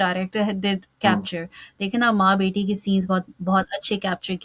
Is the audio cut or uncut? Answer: uncut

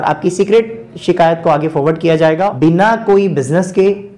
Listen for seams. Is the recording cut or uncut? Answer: cut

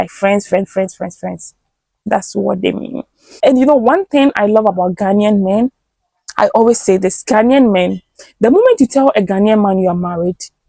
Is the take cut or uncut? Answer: cut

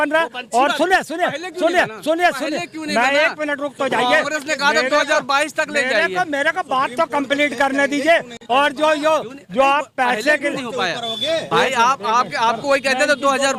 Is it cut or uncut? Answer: uncut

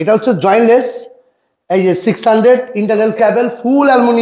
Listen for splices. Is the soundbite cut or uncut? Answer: uncut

